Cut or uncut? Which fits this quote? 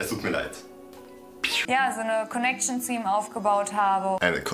cut